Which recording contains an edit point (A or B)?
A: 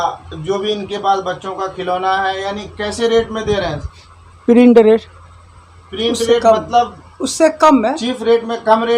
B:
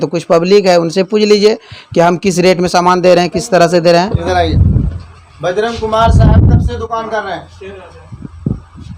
B